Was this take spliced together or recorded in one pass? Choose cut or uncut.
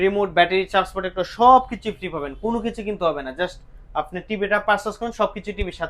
uncut